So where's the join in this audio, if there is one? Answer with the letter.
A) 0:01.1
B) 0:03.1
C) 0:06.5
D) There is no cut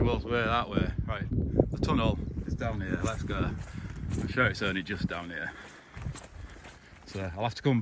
D